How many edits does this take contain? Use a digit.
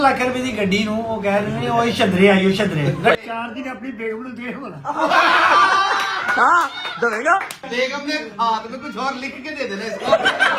2